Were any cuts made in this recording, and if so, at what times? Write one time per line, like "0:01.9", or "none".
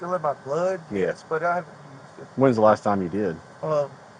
none